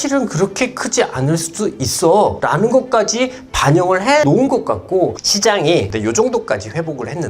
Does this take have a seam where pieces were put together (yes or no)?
yes